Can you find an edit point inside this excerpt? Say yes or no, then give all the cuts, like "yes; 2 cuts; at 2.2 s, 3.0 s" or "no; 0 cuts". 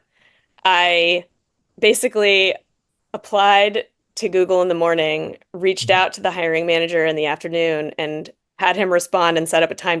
no; 0 cuts